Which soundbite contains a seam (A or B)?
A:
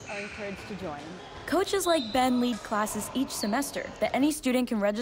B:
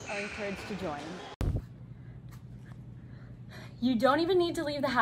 B